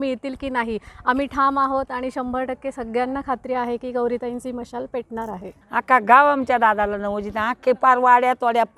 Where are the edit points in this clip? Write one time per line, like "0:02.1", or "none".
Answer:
0:05.5